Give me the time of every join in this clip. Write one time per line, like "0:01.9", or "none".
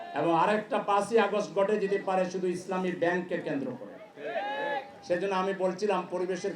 none